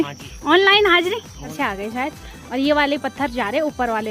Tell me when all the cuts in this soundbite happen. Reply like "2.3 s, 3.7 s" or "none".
1.5 s

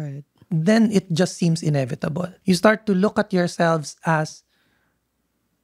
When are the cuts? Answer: 2.3 s

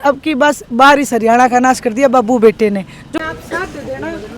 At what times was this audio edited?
3.2 s

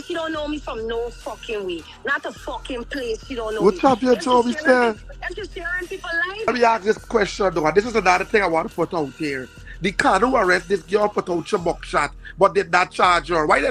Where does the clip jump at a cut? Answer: 6.5 s

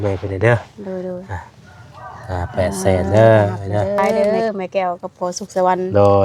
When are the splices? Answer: 4.1 s

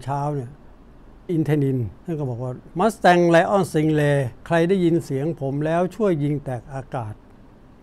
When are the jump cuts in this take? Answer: 0.9 s, 2.2 s, 4.3 s

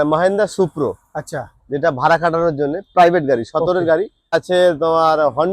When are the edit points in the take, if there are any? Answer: 4.4 s

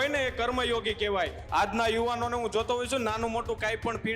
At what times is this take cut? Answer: 1.4 s

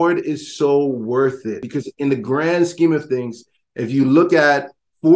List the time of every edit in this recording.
1.7 s

